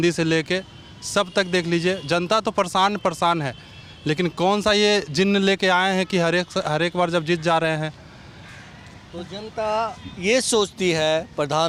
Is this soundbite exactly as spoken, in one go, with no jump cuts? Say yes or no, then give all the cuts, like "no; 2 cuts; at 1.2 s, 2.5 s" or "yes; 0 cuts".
yes; 0 cuts